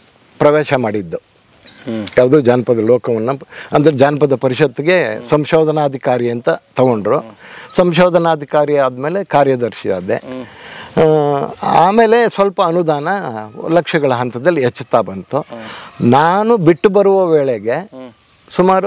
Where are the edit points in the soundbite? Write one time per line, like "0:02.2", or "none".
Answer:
none